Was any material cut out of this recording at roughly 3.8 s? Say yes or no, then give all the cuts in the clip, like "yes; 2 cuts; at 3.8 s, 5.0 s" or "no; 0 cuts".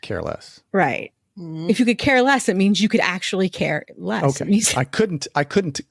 no; 0 cuts